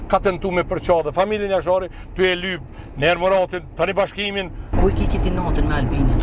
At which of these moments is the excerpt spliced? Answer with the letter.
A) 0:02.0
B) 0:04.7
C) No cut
B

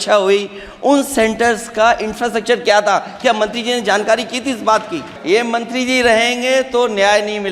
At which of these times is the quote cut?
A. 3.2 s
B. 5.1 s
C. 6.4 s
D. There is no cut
B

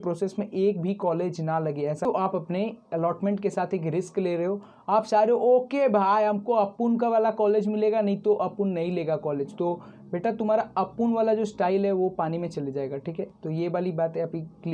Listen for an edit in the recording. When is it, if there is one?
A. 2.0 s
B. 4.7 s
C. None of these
A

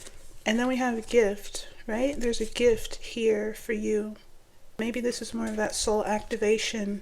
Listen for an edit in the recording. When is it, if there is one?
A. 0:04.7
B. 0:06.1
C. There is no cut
A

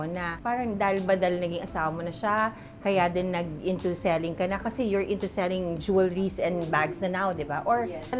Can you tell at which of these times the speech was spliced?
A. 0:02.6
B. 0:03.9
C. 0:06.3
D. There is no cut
D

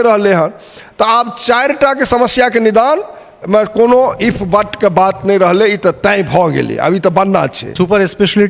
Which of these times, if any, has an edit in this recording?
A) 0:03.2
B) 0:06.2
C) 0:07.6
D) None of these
C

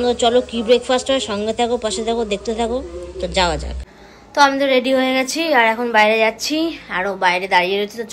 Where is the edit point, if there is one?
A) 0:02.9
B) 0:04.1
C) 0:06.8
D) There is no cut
B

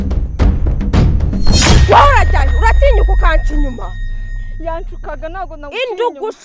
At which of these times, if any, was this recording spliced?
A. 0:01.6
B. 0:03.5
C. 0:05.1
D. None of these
A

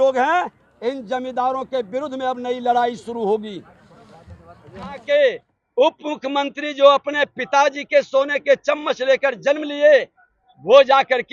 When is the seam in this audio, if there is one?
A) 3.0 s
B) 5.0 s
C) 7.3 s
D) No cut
B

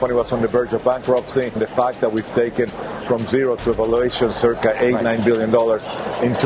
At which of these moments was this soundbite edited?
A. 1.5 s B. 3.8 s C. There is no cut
A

